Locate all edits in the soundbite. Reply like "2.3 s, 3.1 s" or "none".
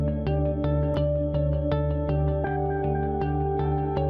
1.4 s